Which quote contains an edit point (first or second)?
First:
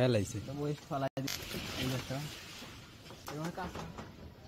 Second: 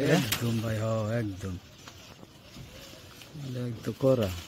first